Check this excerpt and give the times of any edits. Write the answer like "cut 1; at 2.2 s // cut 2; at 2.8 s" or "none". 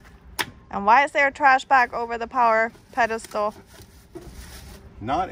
none